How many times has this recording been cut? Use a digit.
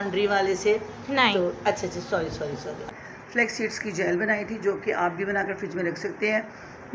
1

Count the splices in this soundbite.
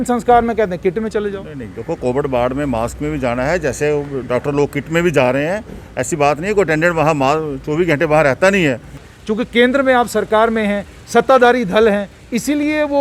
1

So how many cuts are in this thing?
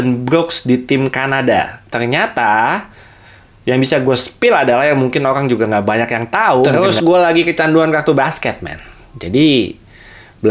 1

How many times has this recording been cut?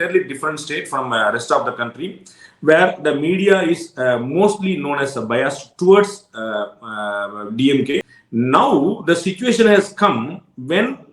1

